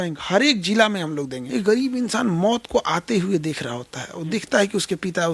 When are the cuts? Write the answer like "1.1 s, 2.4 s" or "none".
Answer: 1.4 s